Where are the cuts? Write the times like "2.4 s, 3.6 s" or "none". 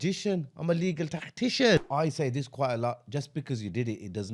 1.9 s